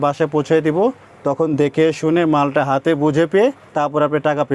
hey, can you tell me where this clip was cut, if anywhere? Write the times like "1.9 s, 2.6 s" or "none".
none